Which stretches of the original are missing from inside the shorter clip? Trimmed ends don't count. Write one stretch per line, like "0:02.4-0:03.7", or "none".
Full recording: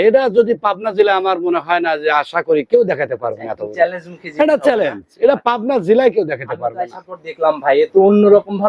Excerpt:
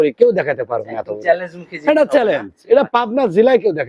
none